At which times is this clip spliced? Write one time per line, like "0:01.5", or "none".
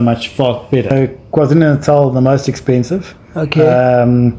0:00.9